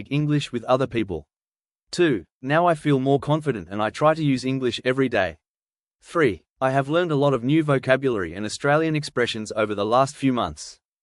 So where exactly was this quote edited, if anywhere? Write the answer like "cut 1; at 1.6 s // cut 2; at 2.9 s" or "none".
none